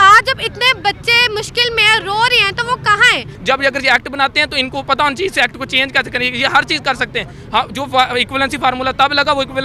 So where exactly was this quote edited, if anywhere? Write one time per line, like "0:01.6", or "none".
0:03.3